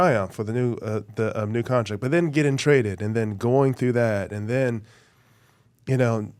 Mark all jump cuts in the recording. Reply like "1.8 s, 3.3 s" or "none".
none